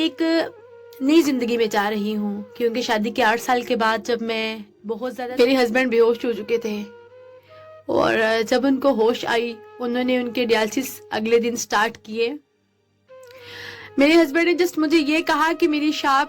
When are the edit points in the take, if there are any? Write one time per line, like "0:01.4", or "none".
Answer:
0:05.0